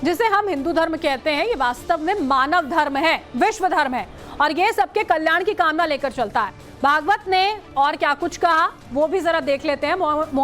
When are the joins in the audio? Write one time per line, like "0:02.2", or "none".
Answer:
0:02.0